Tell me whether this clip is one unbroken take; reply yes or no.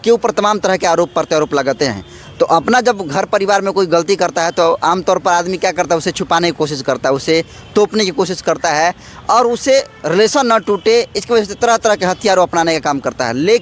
yes